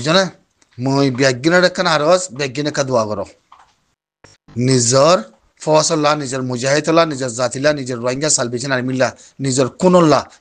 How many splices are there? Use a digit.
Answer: 0